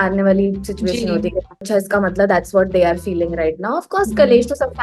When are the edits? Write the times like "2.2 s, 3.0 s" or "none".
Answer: 1.6 s